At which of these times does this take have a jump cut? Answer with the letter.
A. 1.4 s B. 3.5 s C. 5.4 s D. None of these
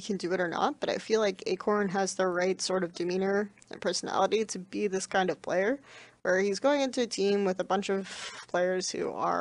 D